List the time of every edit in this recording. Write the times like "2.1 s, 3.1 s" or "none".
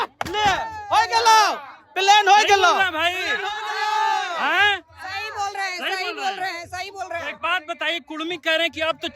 none